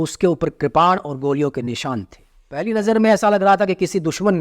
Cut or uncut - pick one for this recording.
cut